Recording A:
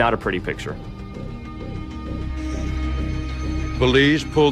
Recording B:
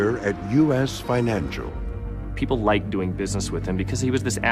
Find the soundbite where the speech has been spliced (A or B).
B